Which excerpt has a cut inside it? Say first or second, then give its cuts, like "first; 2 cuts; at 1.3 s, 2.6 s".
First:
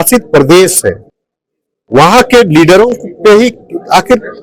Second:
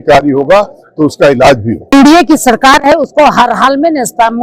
second; 1 cut; at 1.9 s